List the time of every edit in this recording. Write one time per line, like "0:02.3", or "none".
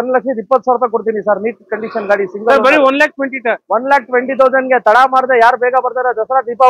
none

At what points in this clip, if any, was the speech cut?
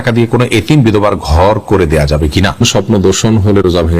0:02.6

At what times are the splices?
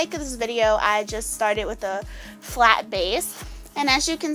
none

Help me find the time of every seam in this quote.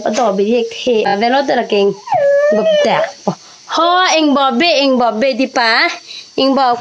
0:01.1

